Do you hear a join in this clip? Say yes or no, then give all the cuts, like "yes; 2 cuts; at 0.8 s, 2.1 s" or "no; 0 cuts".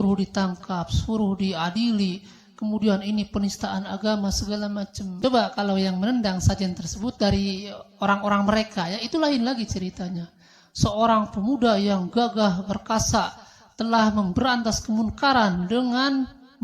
yes; 1 cut; at 5.1 s